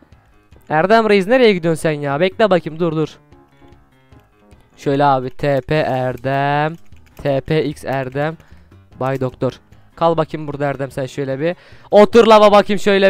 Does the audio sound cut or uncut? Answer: uncut